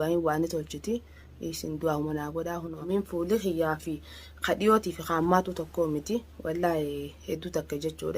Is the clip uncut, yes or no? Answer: no